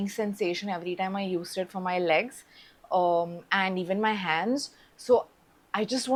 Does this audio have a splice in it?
no; 0 cuts

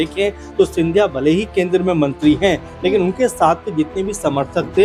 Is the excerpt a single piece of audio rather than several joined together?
yes; 0 cuts

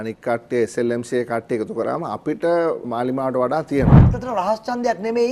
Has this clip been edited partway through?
yes; 2 cuts; at 2.8 s, 4.0 s

